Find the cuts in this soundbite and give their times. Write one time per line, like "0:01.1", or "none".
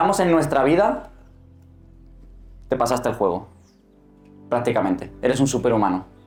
none